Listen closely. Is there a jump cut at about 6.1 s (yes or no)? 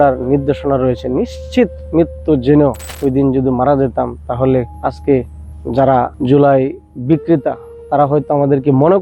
yes